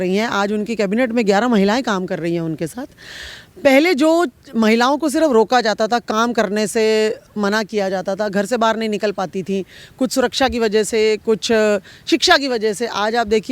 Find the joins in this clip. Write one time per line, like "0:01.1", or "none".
none

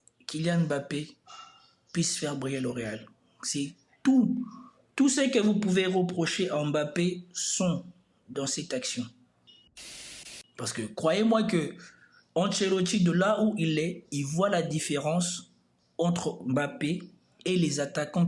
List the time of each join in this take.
0:09.8

